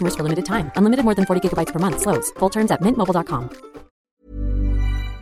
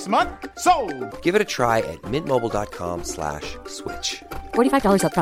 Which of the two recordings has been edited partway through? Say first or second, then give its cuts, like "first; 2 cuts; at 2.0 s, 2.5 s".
first; 1 cut; at 3.9 s